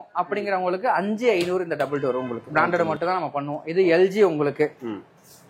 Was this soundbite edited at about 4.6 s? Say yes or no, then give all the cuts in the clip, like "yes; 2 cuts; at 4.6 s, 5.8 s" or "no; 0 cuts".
no; 1 cut; at 2.4 s